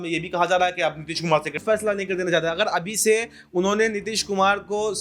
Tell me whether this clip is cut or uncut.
cut